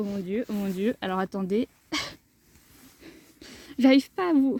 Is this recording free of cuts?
yes; 0 cuts

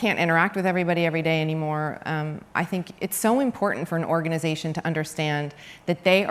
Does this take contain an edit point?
no; 0 cuts

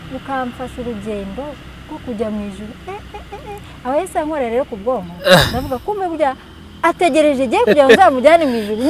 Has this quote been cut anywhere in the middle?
no; 0 cuts

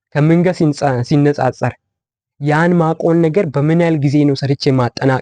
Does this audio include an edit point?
no; 0 cuts

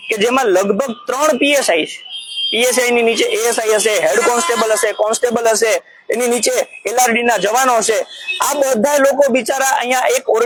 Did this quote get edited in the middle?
no; 0 cuts

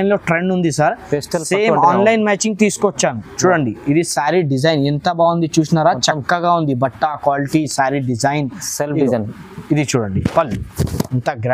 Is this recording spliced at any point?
no; 0 cuts

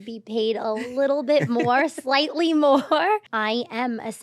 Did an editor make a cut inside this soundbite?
yes; 1 cut; at 3.3 s

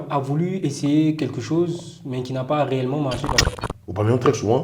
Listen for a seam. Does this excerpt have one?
yes; 1 cut; at 3.5 s

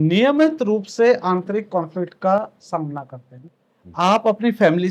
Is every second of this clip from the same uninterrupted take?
no; 1 cut; at 3.4 s

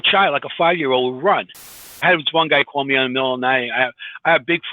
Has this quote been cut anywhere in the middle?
yes; 1 cut; at 2.0 s

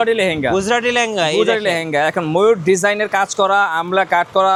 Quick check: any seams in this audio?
no; 0 cuts

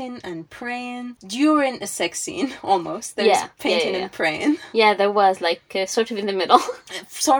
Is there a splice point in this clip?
yes; 1 cut; at 1.2 s

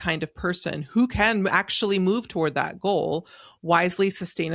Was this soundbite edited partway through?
no; 0 cuts

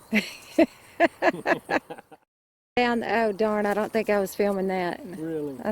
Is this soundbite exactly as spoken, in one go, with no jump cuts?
no; 1 cut; at 2.8 s

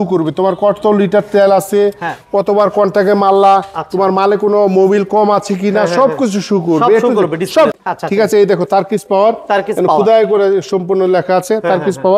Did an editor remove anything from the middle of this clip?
yes; 1 cut; at 7.8 s

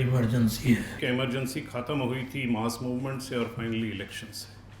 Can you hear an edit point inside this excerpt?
yes; 1 cut; at 1.0 s

